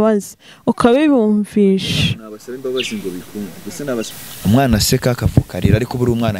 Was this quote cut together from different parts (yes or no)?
yes